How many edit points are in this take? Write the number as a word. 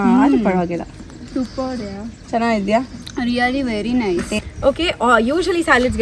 one